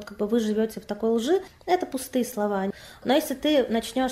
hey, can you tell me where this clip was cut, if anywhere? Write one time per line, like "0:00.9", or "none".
0:02.7

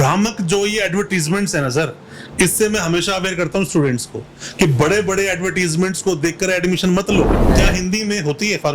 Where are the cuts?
0:07.5

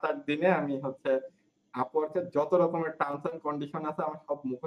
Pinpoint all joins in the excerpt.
none

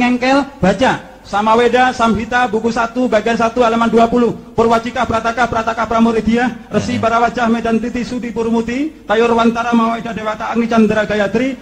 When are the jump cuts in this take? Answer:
none

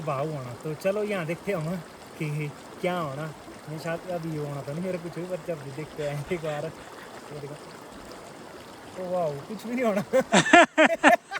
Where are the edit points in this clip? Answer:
none

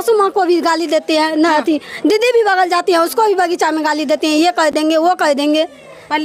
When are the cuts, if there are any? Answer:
none

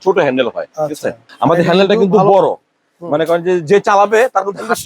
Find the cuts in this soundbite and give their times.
none

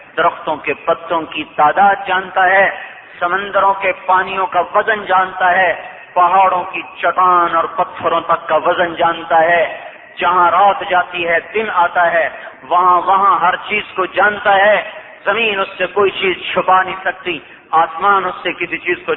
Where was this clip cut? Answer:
0:06.8

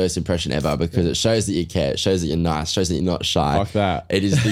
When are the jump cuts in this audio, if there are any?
none

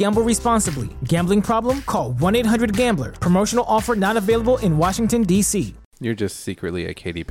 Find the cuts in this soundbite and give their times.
0:05.8

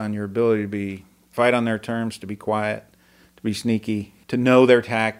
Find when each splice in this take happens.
0:01.2
0:04.1

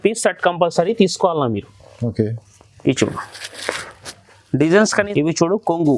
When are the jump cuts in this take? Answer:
0:05.1

